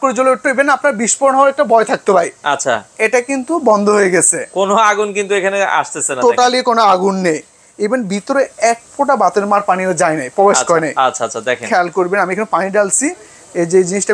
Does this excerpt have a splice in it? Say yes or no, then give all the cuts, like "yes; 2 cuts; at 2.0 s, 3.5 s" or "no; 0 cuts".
no; 0 cuts